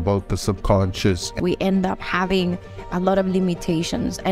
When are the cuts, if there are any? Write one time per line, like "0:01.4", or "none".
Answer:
0:01.3